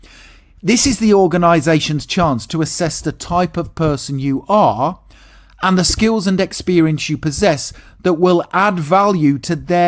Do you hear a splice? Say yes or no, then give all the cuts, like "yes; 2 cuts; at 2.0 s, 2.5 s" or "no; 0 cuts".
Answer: no; 0 cuts